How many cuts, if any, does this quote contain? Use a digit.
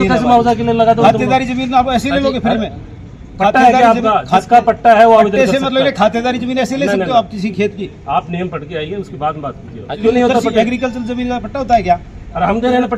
1